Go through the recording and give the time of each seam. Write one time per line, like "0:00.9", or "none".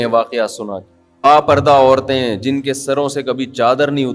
0:01.2